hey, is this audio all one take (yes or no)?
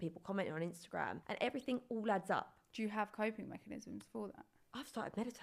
yes